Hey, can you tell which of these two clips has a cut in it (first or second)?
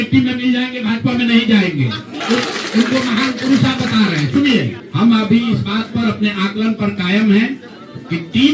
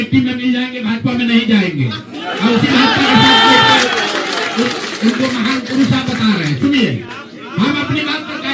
first